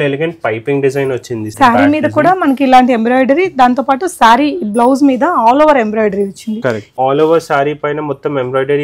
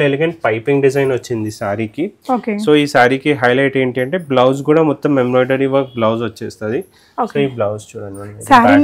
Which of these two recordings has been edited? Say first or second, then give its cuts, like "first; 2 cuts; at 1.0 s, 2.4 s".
first; 2 cuts; at 1.5 s, 6.9 s